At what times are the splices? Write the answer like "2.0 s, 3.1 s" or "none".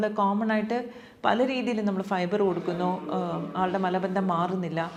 none